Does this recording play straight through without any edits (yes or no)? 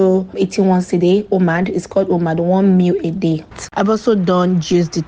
no